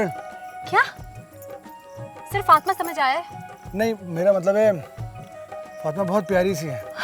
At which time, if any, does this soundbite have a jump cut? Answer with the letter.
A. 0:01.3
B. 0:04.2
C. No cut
C